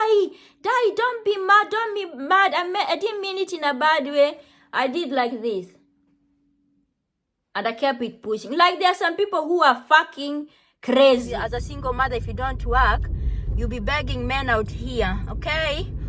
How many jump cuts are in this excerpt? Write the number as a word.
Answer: one